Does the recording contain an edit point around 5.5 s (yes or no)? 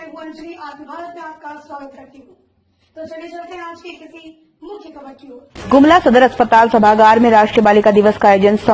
yes